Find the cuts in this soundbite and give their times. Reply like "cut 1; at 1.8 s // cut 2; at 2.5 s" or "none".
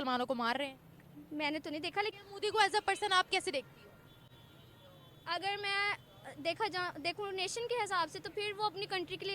cut 1; at 2.1 s